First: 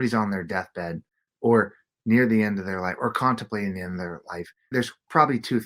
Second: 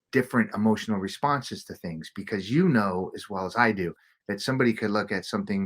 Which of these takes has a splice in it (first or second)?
first